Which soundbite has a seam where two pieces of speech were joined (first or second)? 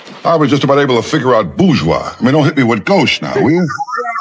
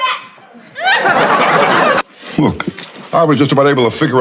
second